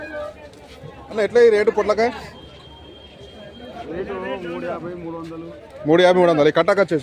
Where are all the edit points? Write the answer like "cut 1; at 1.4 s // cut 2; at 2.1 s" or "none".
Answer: cut 1; at 1.1 s